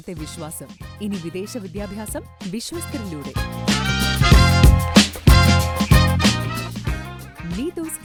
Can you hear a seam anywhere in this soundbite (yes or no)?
no